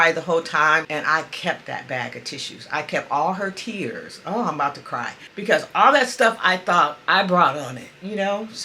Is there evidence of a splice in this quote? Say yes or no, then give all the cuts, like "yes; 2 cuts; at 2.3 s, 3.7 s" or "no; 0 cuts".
yes; 2 cuts; at 0.9 s, 5.4 s